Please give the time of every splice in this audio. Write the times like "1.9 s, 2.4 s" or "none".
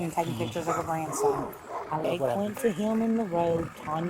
2.0 s